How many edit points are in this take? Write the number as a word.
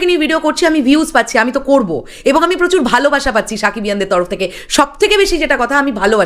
zero